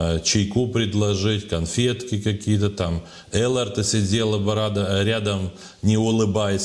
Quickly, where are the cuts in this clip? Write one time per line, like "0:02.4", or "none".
none